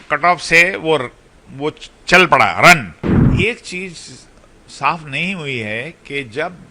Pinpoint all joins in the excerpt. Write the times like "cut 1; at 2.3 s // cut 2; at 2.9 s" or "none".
cut 1; at 3.2 s